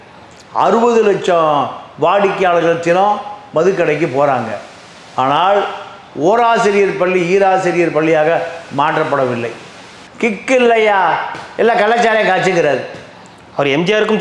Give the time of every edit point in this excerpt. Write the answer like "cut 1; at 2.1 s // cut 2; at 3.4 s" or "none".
cut 1; at 10.0 s